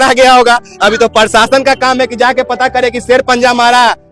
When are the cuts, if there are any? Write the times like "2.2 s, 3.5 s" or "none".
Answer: none